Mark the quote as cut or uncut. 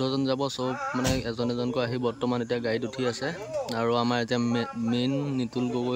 uncut